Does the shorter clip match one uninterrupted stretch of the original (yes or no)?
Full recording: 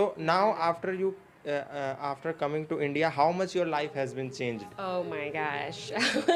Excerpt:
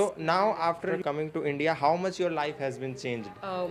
no